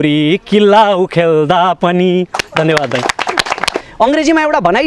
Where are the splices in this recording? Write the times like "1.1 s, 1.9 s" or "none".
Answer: 3.8 s